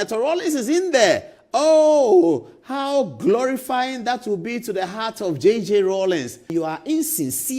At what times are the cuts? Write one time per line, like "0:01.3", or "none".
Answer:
0:06.5